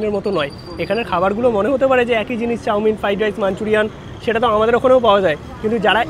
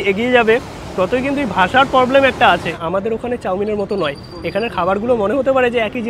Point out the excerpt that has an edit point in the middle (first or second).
second